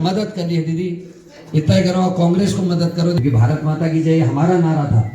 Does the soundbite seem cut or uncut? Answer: cut